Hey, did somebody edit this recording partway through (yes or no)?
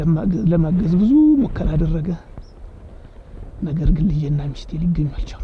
no